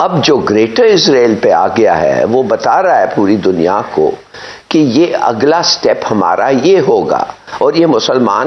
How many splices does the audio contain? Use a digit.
0